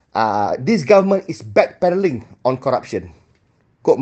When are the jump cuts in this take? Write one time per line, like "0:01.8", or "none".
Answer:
none